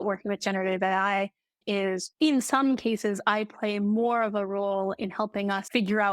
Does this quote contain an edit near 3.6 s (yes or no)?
no